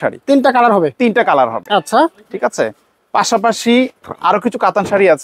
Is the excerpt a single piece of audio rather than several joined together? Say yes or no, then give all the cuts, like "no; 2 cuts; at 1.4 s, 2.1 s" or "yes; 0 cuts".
yes; 0 cuts